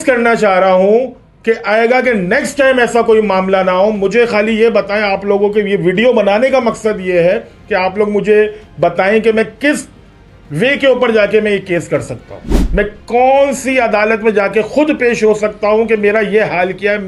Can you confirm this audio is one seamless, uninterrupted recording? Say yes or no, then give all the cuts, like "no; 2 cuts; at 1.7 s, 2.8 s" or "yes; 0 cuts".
yes; 0 cuts